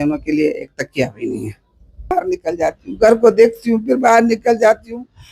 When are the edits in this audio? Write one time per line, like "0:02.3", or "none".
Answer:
0:02.1